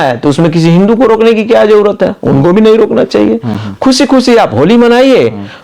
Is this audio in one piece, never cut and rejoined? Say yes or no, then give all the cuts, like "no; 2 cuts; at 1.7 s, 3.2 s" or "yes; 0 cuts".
yes; 0 cuts